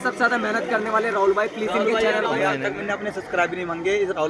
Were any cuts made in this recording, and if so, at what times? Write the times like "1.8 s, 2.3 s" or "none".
2.6 s